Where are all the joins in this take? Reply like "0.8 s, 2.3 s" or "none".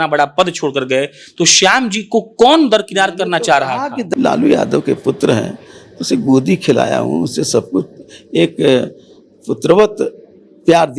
4.1 s